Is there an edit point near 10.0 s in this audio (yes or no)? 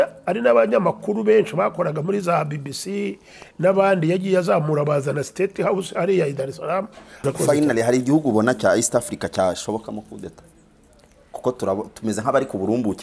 no